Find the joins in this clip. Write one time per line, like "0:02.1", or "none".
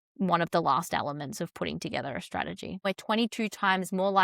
0:02.8